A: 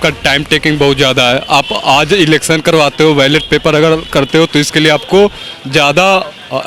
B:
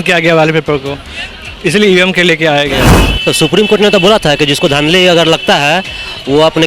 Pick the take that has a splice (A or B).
B